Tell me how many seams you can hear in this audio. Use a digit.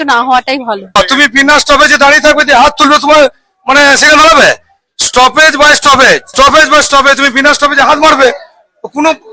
1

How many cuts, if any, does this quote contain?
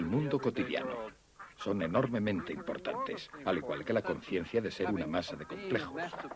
1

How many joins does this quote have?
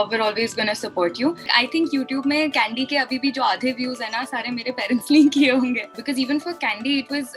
2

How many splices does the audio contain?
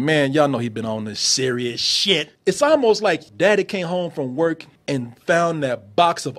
3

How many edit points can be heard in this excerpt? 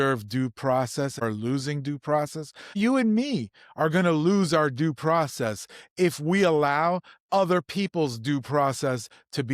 2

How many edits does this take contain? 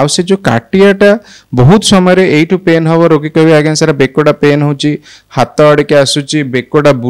0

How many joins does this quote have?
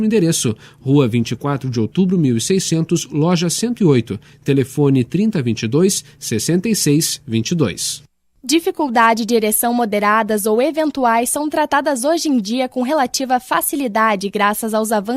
1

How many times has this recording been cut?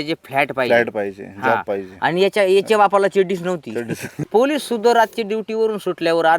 1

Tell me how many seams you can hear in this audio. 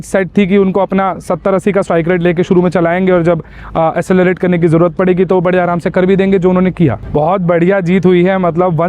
1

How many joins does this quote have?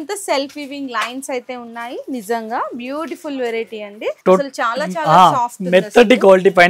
1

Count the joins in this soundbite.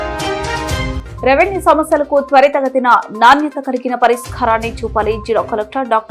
1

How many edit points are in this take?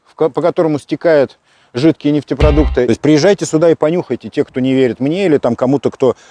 1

